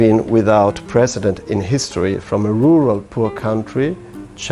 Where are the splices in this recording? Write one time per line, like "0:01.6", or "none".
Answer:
none